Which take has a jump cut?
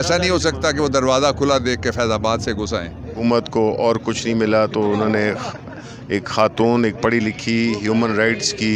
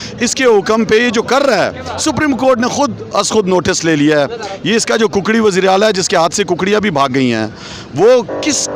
first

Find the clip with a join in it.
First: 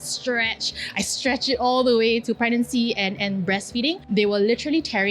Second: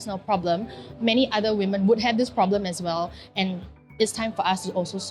first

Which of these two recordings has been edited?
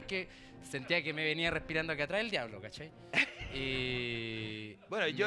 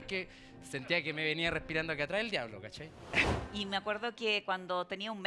second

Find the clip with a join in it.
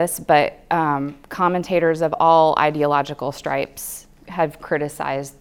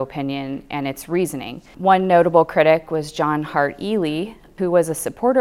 second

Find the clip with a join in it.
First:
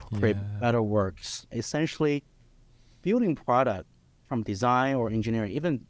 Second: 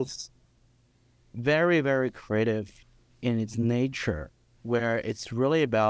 first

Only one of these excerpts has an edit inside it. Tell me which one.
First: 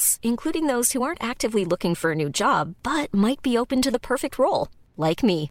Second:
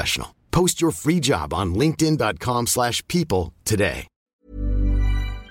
second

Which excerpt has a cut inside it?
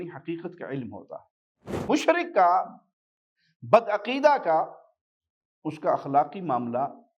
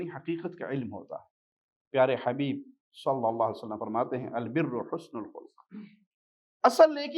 first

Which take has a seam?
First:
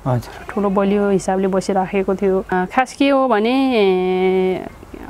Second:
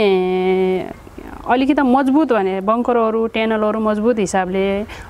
first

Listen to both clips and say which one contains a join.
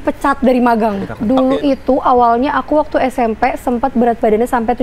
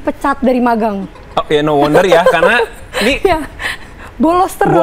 first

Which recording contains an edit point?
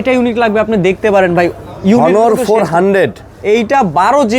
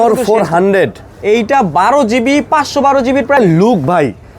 second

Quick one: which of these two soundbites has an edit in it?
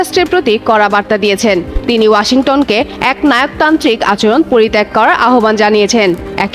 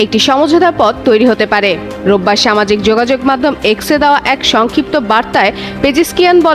first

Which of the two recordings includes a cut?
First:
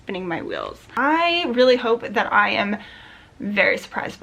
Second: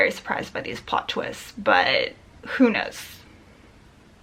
first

